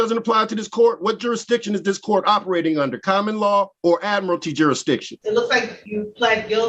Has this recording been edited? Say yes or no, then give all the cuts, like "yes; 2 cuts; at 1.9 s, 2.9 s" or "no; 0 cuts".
yes; 3 cuts; at 3.7 s, 5.1 s, 5.8 s